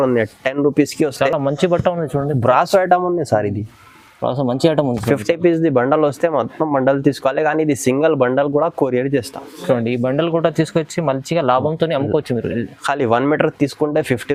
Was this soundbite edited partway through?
no; 0 cuts

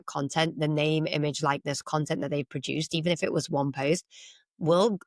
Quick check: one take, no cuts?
yes; 0 cuts

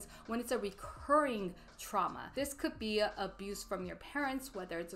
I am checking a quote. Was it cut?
no; 0 cuts

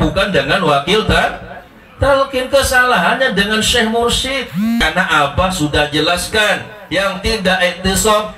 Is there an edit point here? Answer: yes; 1 cut; at 4.8 s

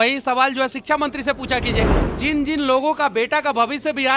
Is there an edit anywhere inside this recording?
yes; 1 cut; at 2.0 s

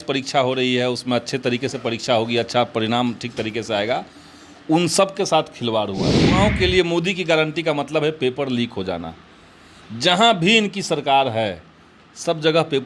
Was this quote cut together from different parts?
yes; 1 cut; at 6.3 s

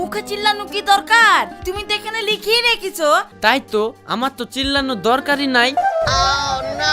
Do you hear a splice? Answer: yes; 2 cuts; at 3.3 s, 5.8 s

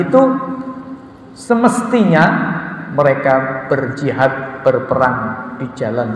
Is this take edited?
no; 0 cuts

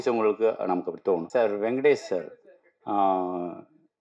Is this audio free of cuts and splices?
no; 1 cut; at 1.2 s

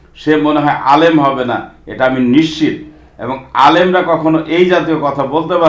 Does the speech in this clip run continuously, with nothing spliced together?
yes; 0 cuts

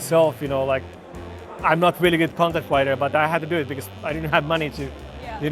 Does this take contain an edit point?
no; 0 cuts

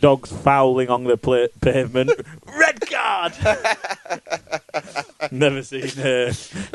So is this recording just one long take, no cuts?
yes; 0 cuts

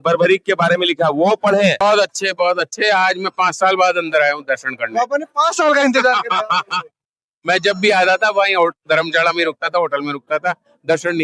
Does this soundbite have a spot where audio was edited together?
yes; 1 cut; at 1.8 s

